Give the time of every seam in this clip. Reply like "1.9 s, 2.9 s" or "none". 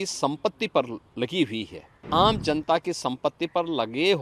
2.1 s